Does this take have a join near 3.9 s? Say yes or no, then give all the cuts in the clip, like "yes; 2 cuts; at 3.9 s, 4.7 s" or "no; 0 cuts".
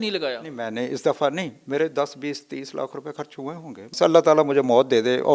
yes; 1 cut; at 3.9 s